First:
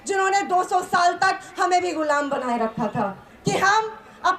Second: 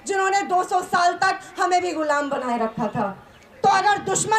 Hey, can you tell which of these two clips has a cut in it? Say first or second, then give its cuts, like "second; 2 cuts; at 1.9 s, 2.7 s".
first; 1 cut; at 3.3 s